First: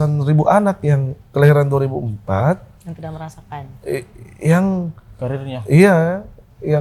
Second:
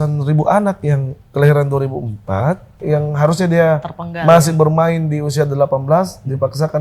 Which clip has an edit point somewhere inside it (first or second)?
second